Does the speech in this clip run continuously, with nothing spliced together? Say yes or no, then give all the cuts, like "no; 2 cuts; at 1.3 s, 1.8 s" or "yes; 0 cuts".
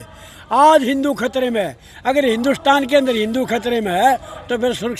yes; 0 cuts